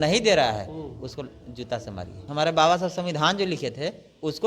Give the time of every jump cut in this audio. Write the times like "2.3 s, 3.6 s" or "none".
2.2 s